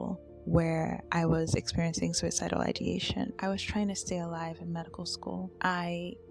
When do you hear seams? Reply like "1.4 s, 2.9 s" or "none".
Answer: 1.0 s, 3.3 s, 5.5 s